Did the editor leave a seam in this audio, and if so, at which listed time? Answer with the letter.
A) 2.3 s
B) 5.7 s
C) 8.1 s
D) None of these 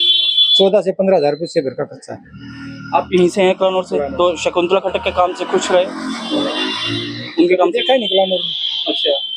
D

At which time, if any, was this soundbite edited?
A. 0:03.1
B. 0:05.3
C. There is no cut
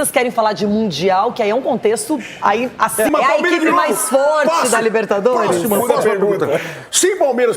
A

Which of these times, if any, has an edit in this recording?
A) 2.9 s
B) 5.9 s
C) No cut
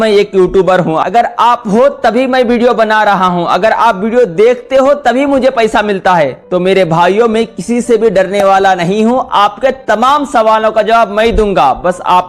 C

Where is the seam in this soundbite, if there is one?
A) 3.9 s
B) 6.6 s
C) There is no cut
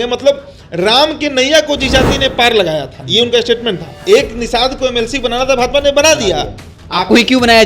A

